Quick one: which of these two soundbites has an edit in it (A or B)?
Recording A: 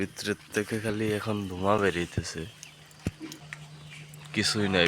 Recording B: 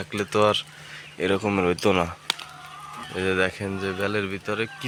A